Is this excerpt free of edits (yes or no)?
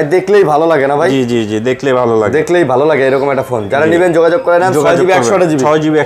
yes